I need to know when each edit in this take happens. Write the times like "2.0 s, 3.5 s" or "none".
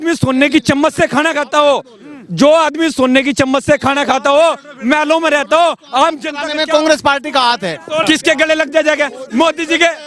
8.0 s